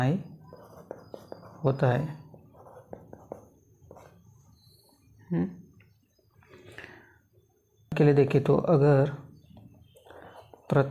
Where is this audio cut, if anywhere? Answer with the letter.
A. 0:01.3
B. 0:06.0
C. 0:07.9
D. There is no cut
C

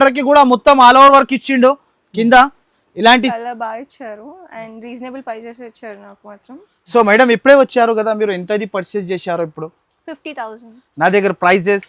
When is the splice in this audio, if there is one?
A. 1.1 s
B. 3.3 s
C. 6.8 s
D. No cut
B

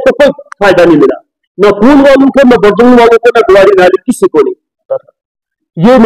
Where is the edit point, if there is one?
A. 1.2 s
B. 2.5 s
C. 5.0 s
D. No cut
C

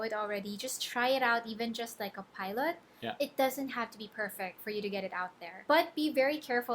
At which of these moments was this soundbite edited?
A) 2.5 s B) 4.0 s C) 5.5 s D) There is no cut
C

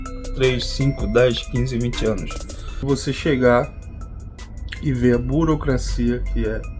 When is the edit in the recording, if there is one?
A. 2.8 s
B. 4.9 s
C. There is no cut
A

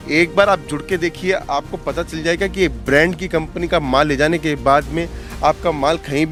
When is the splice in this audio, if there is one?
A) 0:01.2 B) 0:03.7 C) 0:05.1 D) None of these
D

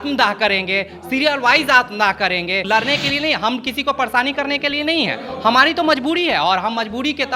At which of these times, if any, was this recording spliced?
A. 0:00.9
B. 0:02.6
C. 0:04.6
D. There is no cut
B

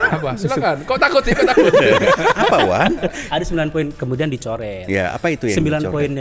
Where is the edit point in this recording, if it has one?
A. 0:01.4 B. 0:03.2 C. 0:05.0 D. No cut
B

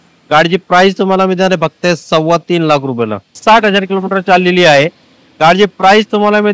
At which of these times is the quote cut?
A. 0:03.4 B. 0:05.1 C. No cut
A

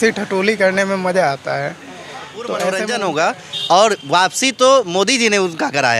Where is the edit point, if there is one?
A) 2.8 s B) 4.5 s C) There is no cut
A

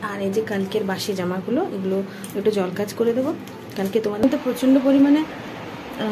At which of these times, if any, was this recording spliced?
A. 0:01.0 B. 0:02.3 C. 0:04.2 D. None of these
C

